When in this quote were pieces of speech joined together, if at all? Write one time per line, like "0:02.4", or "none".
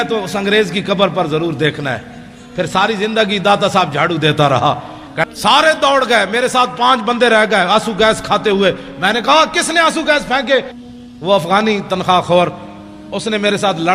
0:05.2
0:10.7